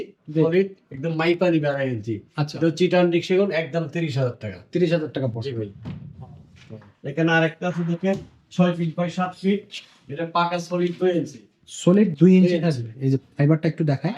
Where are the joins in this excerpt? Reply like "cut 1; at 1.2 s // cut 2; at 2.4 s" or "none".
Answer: none